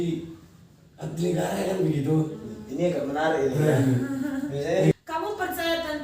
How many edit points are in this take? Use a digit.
1